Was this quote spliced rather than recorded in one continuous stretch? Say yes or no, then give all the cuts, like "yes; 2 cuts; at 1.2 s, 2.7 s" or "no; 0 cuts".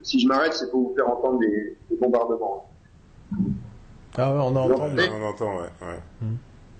no; 0 cuts